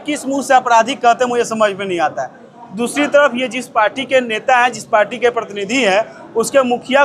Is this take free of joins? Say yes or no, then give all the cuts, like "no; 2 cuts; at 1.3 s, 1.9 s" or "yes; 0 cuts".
yes; 0 cuts